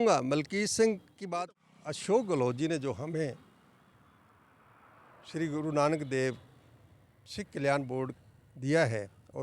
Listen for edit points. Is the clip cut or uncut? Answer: cut